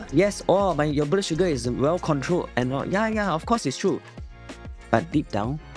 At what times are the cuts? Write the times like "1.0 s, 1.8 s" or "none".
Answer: none